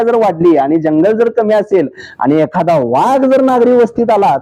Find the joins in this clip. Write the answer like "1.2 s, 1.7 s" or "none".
none